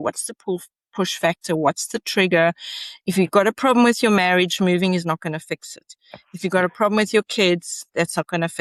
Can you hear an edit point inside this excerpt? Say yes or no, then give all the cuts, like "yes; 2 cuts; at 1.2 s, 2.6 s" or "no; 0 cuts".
no; 0 cuts